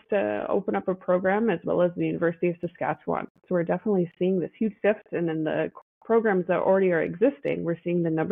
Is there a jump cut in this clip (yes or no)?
no